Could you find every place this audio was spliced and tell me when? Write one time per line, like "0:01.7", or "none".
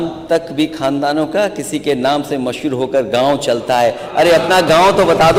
none